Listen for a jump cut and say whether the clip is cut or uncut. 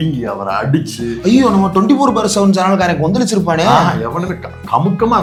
uncut